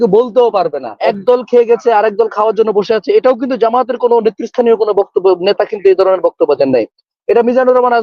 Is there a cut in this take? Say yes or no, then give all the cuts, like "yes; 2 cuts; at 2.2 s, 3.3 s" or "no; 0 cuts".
yes; 1 cut; at 0.9 s